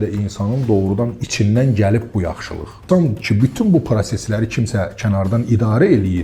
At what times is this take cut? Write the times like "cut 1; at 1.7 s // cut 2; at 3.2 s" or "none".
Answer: cut 1; at 2.7 s